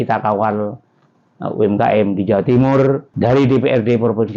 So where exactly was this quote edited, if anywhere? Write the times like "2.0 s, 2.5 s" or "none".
3.1 s